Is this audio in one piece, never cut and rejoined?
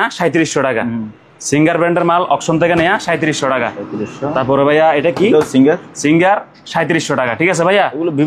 yes; 0 cuts

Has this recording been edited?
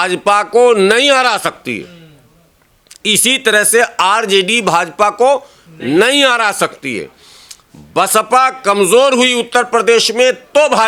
no; 0 cuts

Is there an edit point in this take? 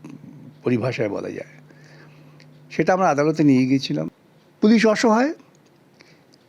yes; 1 cut; at 4.2 s

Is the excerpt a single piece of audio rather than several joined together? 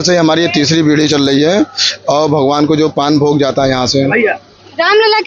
yes; 0 cuts

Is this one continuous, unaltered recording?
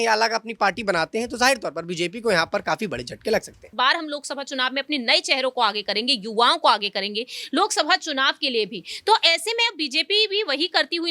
no; 1 cut; at 3.6 s

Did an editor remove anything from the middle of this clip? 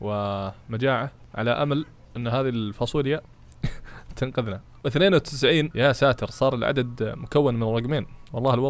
no; 0 cuts

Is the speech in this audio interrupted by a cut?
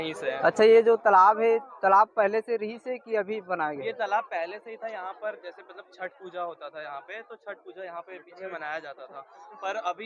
no; 0 cuts

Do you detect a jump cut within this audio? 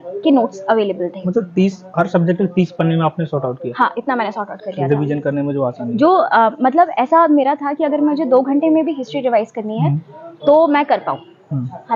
no; 0 cuts

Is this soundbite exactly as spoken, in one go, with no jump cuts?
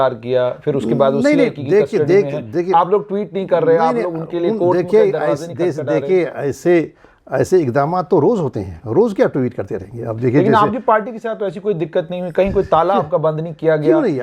yes; 0 cuts

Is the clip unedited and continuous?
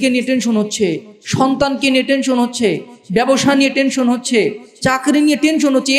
yes; 0 cuts

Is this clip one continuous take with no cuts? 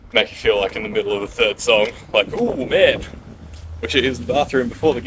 yes; 0 cuts

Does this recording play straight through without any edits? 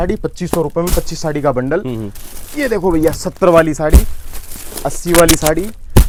yes; 0 cuts

